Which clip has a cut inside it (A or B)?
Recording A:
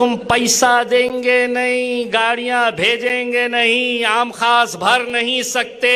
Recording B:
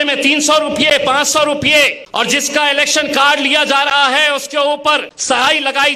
B